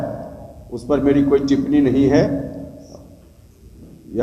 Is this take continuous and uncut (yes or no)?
yes